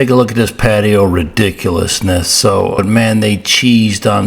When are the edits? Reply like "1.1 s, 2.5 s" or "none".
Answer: 2.8 s